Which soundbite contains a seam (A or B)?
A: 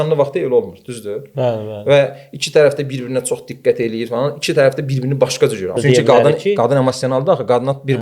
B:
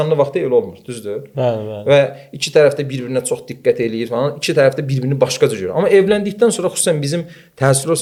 A